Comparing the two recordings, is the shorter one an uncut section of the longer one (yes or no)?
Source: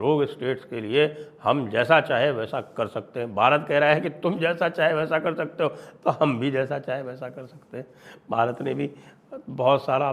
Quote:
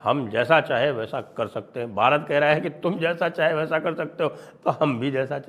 yes